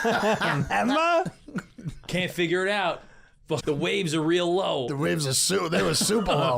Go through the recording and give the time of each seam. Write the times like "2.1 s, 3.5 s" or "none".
3.6 s